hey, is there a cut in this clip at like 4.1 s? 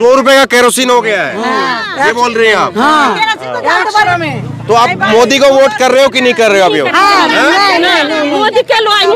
yes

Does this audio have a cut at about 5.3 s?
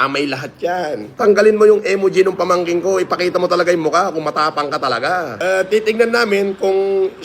yes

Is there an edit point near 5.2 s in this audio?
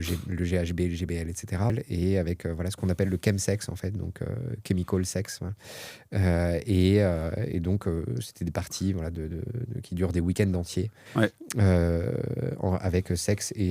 no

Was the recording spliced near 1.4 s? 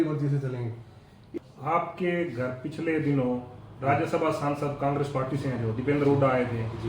yes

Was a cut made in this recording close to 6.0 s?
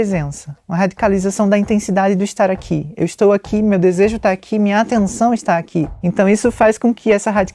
yes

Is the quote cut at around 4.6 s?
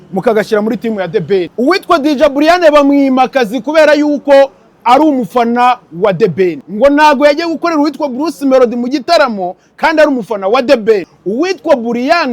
no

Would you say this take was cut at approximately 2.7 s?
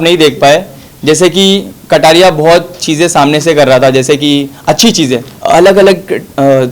no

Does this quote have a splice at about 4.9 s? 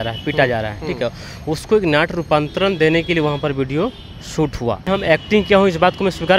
yes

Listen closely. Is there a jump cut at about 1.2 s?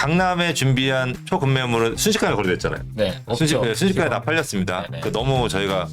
yes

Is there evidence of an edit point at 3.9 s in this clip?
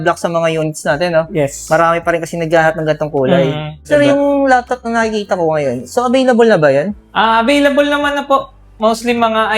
yes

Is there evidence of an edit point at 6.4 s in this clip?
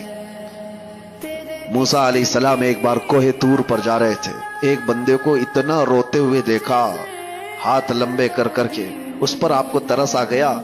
no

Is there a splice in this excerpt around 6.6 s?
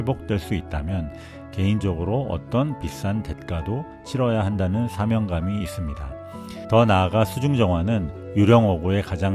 yes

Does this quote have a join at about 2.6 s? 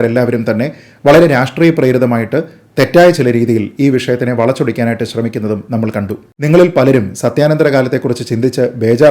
no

